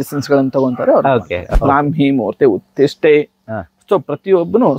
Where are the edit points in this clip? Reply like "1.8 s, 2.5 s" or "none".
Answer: 1.4 s